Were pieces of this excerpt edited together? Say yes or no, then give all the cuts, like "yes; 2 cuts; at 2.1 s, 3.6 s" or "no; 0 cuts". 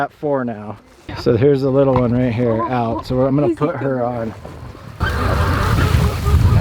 yes; 2 cuts; at 1.1 s, 5.0 s